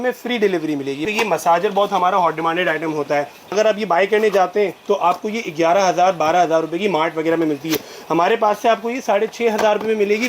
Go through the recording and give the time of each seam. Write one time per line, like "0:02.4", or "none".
0:01.0
0:03.5